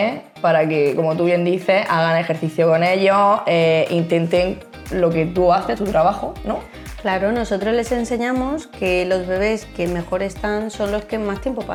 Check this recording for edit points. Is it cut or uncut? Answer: uncut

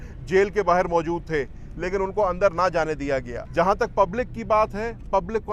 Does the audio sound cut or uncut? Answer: uncut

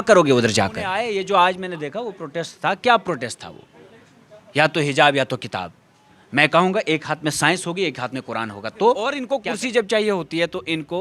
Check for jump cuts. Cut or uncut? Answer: cut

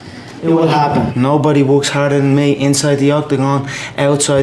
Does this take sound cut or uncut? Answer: cut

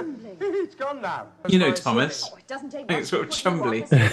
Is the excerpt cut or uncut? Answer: cut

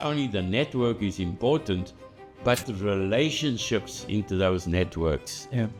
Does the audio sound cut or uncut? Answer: uncut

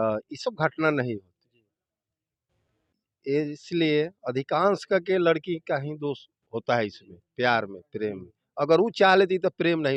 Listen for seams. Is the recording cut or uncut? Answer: uncut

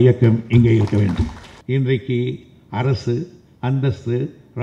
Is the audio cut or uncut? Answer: cut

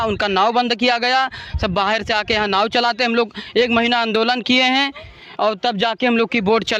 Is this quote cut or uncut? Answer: uncut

